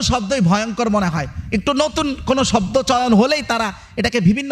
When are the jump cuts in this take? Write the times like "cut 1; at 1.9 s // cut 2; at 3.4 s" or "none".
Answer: none

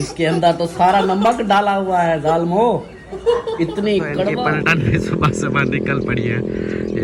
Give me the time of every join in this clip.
cut 1; at 4.3 s

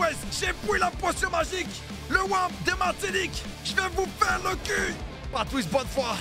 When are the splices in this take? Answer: cut 1; at 5.2 s

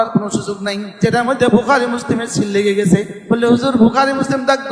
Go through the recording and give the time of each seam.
cut 1; at 1.0 s // cut 2; at 3.1 s

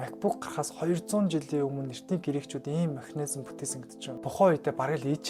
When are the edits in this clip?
cut 1; at 4.1 s

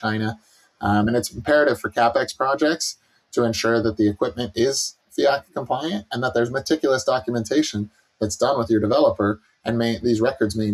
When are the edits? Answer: none

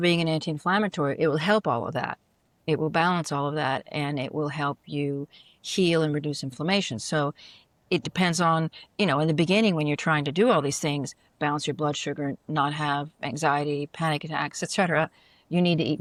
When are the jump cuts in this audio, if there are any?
none

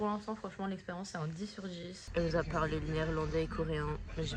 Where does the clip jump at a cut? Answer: cut 1; at 2.0 s

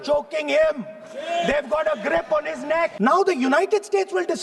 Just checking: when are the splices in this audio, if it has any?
cut 1; at 2.9 s

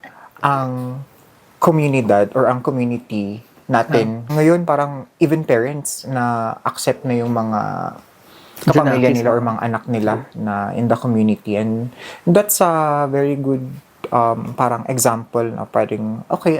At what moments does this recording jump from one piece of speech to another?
cut 1; at 4.3 s

